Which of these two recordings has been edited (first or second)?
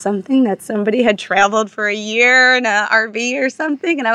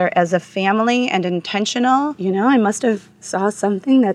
second